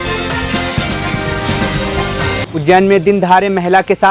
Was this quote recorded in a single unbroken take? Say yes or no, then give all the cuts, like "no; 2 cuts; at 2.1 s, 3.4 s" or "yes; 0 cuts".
no; 1 cut; at 2.5 s